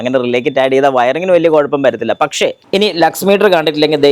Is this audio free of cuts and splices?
no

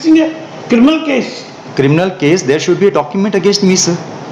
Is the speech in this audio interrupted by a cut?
no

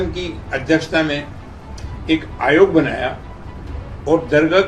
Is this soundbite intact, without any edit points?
yes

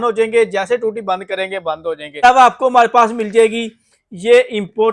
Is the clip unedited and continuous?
no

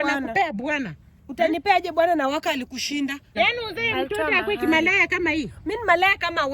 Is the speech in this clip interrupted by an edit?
yes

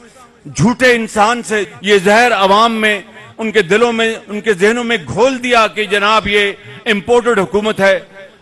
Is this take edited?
yes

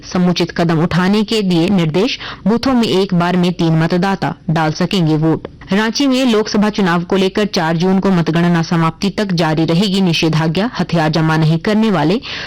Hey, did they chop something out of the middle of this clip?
yes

